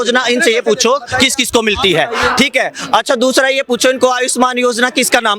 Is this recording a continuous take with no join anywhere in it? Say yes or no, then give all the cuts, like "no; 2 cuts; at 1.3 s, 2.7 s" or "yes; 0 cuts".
yes; 0 cuts